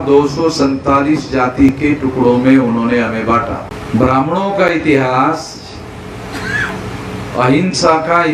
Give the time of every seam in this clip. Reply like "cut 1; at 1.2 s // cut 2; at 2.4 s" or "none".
cut 1; at 3.7 s